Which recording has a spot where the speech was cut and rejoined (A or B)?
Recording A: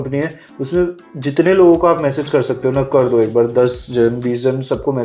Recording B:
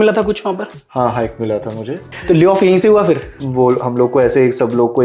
B